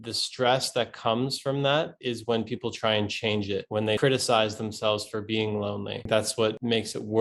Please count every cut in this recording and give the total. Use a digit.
1